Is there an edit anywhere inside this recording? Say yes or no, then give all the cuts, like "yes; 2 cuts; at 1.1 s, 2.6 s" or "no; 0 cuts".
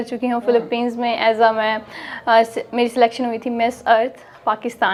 no; 0 cuts